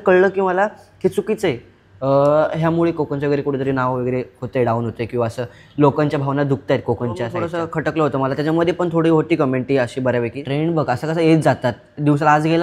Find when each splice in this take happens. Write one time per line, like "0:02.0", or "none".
0:07.4
0:10.4

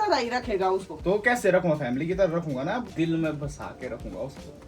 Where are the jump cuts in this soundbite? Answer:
0:00.9
0:02.8

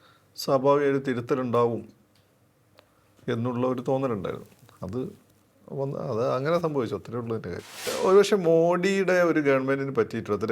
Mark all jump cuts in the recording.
0:07.9

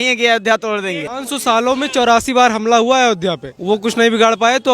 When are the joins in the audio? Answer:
0:01.1
0:03.5

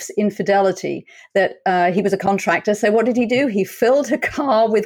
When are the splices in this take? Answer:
none

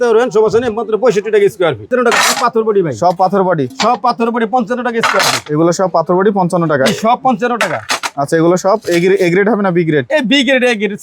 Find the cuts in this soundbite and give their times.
0:01.9

